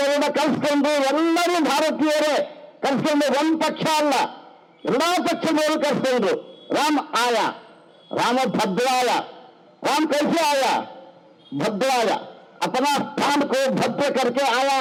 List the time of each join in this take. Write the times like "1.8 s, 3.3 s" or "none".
none